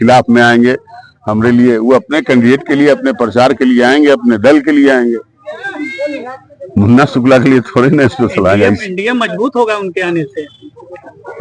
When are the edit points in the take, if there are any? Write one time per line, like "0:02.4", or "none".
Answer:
none